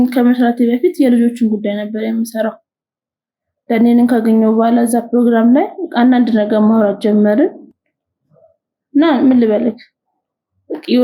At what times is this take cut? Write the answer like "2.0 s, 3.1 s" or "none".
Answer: none